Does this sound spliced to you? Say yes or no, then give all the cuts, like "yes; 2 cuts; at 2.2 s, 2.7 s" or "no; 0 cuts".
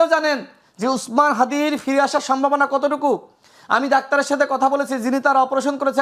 no; 0 cuts